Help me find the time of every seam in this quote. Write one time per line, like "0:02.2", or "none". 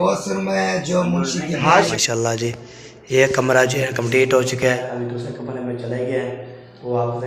0:01.9
0:04.8